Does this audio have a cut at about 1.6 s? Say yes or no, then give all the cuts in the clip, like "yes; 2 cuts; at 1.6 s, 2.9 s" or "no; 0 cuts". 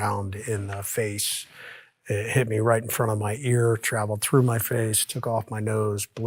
no; 0 cuts